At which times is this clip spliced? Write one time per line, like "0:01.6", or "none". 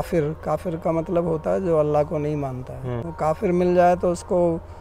0:03.0

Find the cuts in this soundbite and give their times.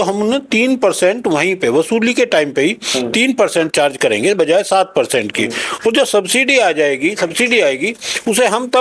none

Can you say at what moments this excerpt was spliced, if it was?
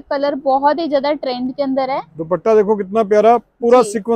none

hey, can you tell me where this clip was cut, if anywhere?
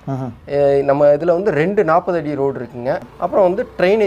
0:03.1

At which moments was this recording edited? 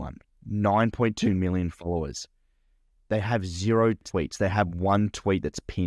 0:04.0

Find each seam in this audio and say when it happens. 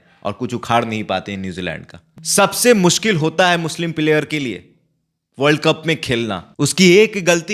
0:02.1
0:06.4

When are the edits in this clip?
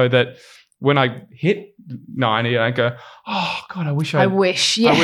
none

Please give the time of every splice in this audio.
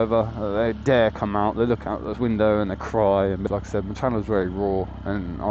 0:03.4

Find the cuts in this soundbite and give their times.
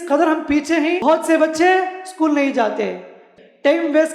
0:01.0
0:03.2

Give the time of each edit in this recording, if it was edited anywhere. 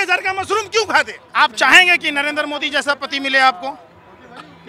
0:01.2

